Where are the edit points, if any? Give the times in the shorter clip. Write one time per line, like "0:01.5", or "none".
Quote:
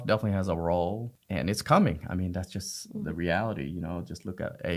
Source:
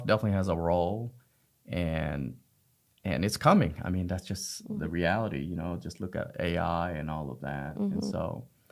0:01.1